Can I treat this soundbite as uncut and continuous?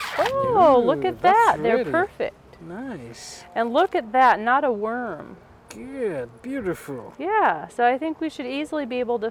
yes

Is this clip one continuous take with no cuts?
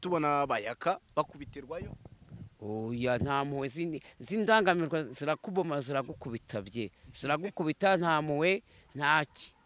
yes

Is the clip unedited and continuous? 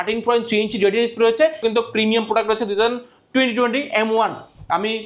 no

